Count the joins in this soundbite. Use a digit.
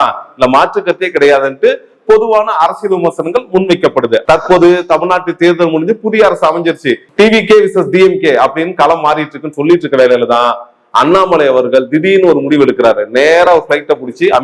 1